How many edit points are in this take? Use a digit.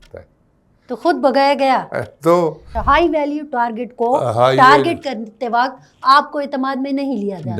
1